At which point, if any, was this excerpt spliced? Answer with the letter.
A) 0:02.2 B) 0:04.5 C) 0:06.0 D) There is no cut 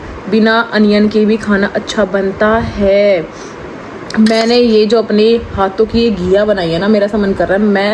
D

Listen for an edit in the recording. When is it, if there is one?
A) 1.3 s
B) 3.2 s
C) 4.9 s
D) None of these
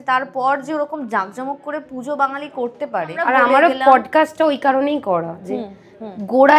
B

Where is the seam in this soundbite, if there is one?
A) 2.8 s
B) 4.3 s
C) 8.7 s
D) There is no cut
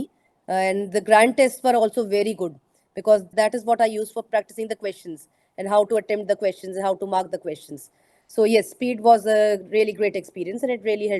B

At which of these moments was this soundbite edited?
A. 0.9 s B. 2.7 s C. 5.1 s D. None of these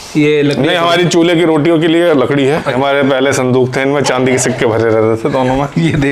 B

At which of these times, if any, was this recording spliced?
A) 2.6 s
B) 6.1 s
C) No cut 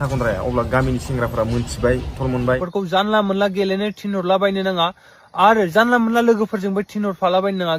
A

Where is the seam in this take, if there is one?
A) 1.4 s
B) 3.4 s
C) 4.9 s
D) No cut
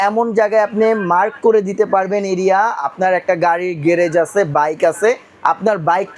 D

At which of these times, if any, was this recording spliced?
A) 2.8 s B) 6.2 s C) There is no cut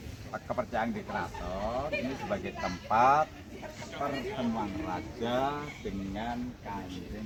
C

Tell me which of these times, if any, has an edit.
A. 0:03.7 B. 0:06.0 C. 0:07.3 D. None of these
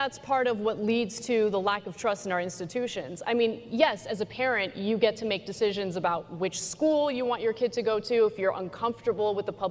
D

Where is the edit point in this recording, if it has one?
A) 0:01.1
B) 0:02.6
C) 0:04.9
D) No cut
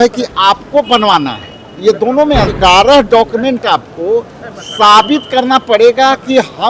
B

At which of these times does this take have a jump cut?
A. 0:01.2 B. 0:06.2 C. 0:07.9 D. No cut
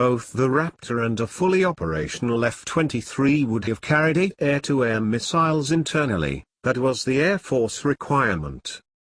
C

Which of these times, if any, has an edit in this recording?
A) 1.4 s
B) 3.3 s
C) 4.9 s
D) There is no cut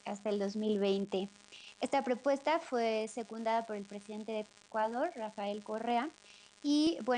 B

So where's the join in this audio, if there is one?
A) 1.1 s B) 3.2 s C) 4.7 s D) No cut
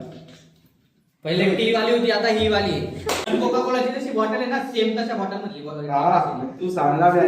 B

